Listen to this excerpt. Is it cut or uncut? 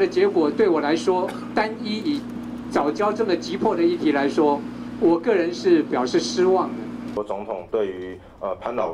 cut